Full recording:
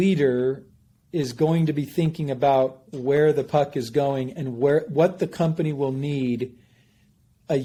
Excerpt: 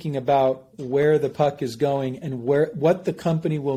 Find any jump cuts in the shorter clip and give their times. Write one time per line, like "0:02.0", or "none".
none